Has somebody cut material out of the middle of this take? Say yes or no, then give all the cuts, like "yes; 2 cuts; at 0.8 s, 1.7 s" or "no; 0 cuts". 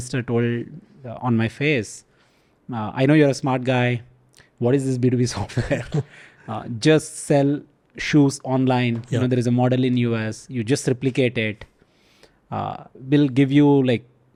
no; 0 cuts